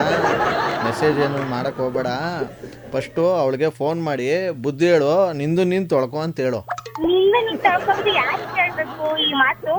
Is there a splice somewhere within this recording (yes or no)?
no